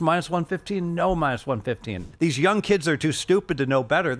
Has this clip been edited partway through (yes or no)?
yes